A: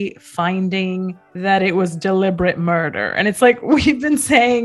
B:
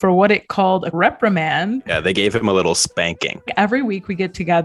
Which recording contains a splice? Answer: B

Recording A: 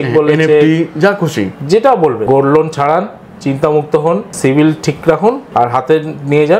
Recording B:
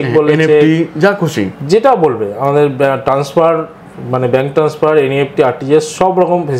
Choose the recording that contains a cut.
A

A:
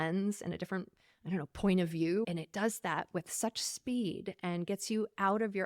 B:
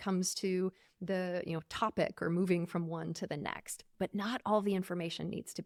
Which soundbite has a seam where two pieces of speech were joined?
A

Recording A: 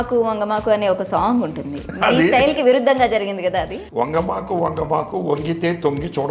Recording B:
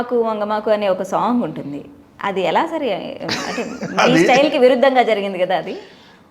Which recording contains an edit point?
A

